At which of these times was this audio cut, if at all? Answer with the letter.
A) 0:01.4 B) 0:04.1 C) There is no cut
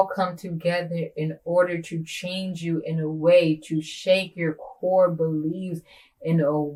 C